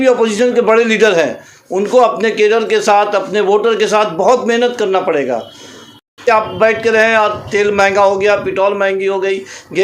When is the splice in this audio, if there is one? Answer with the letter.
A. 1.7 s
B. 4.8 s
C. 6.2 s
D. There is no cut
C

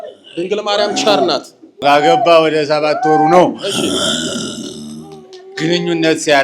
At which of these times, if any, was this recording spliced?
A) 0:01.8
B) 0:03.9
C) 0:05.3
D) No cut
A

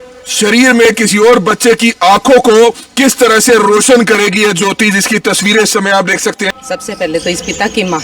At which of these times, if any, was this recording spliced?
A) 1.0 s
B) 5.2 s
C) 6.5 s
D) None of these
C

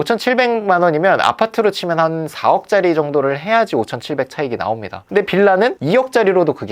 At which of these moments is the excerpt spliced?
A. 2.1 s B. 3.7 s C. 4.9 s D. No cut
C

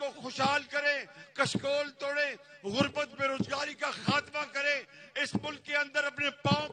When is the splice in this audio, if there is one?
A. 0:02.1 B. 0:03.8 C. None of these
C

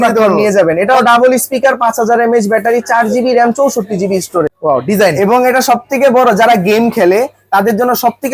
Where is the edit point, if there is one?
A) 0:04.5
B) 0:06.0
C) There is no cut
A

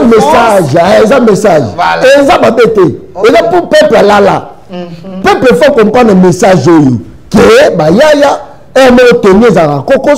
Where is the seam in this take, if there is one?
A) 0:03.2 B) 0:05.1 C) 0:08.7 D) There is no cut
D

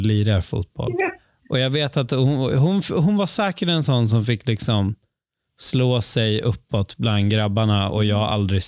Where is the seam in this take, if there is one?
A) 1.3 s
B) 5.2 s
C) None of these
A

